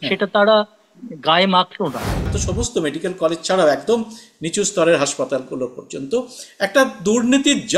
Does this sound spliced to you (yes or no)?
yes